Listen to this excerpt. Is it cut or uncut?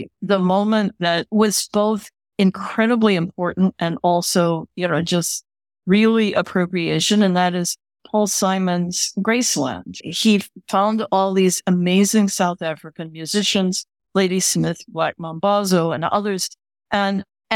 cut